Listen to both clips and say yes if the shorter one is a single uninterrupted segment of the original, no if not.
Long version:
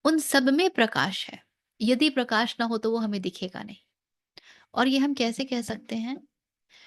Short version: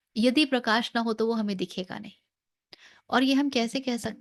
yes